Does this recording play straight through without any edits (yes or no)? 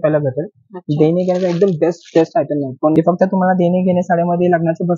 no